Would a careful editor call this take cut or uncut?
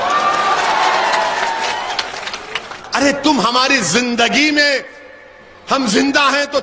cut